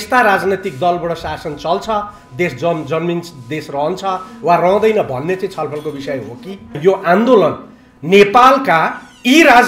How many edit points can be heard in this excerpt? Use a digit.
1